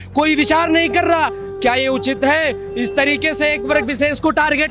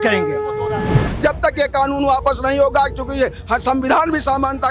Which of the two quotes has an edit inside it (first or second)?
second